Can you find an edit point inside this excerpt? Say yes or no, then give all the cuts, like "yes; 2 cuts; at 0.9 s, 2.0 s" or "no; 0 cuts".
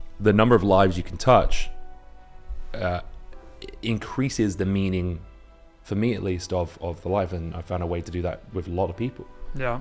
no; 0 cuts